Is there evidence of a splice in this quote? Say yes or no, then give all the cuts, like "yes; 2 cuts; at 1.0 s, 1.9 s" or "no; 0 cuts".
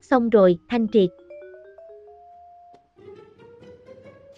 yes; 1 cut; at 1.1 s